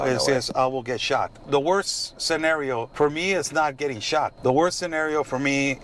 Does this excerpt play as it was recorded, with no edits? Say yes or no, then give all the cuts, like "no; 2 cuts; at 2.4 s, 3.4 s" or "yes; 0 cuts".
no; 3 cuts; at 1.4 s, 2.9 s, 4.3 s